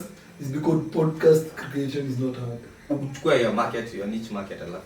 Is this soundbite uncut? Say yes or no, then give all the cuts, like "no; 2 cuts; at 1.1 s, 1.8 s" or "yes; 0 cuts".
no; 1 cut; at 2.9 s